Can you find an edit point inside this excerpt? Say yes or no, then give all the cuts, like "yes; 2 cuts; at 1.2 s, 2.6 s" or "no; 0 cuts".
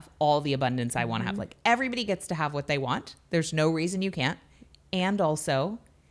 no; 0 cuts